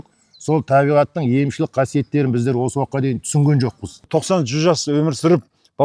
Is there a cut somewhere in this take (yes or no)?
yes